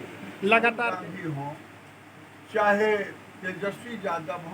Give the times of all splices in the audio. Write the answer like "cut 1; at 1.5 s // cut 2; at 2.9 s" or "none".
cut 1; at 1.0 s